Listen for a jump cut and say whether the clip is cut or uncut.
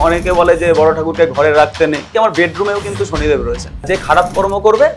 cut